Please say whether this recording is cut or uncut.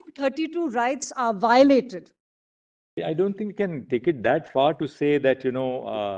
cut